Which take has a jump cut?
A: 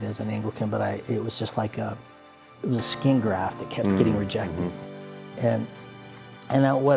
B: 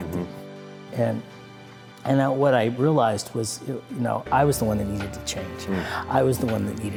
A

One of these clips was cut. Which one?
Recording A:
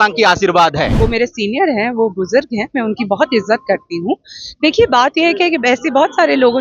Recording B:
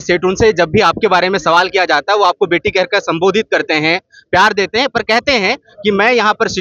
A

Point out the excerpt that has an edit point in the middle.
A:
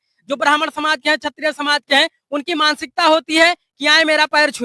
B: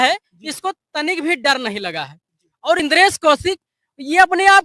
B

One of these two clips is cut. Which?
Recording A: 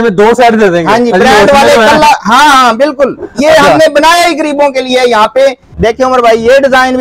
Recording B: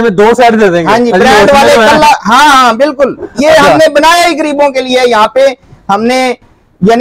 A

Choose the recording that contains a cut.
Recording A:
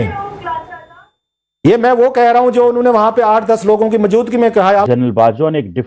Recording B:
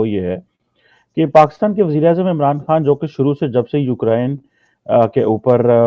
A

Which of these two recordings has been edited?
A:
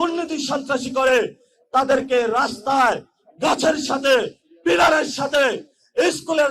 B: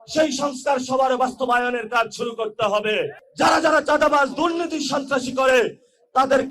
B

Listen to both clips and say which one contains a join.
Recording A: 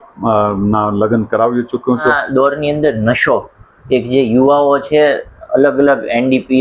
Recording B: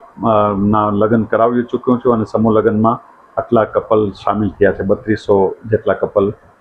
A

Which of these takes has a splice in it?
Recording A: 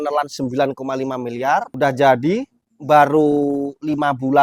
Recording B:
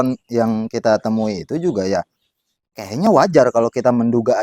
A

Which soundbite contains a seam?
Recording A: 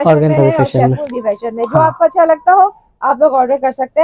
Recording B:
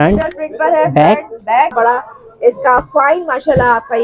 B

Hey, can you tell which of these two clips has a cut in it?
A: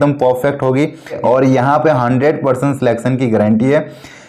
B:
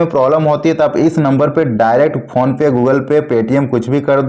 A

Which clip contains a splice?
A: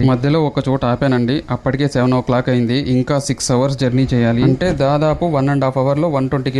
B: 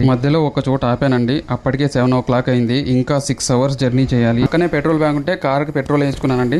B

